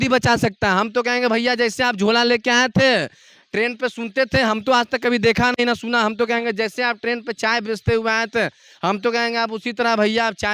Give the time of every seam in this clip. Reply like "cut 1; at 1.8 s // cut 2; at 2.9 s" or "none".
none